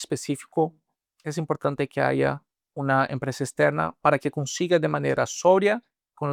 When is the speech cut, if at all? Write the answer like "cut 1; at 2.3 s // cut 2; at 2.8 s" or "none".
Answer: none